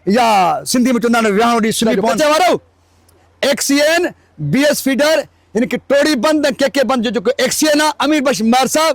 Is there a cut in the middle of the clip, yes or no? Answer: yes